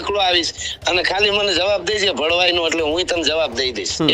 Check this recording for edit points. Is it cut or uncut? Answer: uncut